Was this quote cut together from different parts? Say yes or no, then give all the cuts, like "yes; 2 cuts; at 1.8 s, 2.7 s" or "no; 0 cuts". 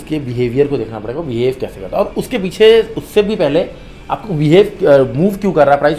no; 0 cuts